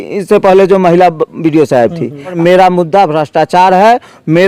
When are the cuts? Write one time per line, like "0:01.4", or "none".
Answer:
0:02.4